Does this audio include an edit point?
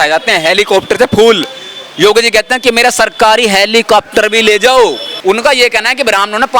yes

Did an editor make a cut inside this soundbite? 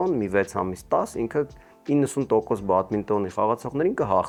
no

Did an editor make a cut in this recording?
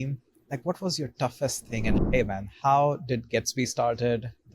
yes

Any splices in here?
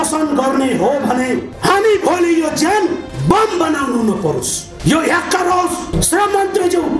yes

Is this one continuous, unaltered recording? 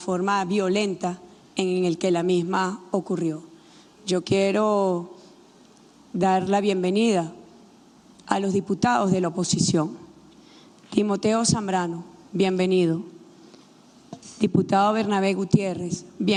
yes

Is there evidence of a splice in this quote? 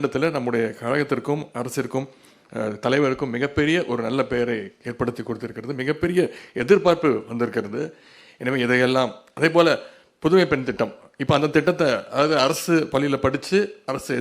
no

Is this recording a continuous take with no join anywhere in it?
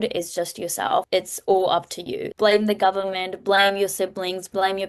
no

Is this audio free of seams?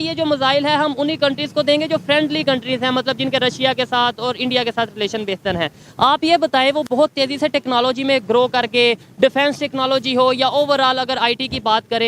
yes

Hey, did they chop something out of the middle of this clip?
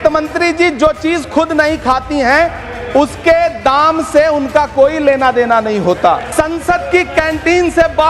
yes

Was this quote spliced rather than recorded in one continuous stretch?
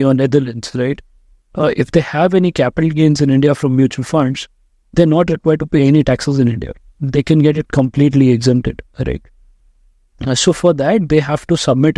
no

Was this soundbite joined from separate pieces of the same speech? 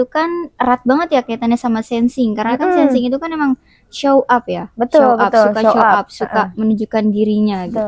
no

